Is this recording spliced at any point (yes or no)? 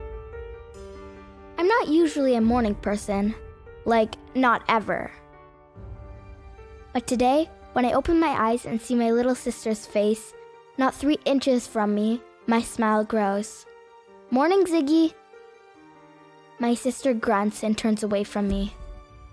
yes